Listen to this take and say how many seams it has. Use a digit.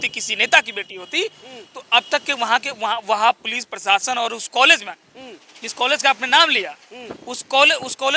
0